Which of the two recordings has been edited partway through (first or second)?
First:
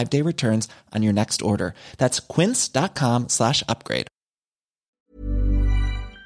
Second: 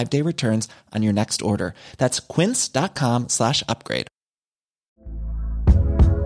first